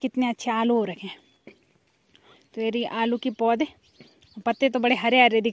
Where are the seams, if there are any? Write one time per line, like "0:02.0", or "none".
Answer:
none

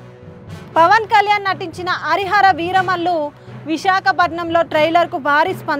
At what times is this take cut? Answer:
none

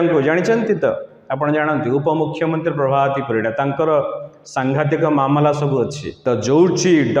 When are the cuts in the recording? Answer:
0:06.1

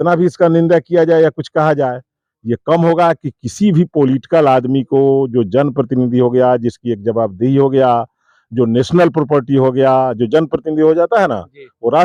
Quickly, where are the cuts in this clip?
none

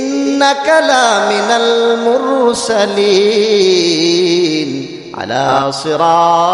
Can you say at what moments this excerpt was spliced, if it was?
0:05.5

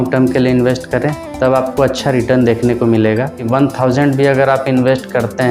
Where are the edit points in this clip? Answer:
0:03.4

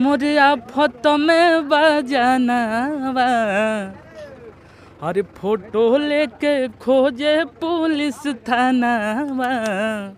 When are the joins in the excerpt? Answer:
none

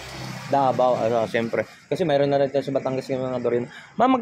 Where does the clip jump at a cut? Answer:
none

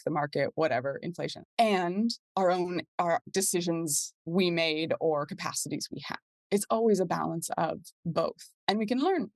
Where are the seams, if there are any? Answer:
0:01.4
0:02.2
0:03.2
0:08.5

